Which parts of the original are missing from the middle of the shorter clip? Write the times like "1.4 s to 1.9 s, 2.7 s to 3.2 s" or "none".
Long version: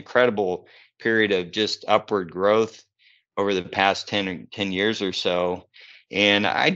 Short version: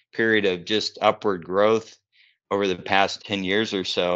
4.0 s to 4.5 s